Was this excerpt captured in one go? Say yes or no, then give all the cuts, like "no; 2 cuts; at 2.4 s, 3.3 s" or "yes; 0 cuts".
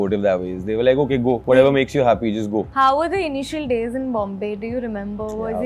yes; 0 cuts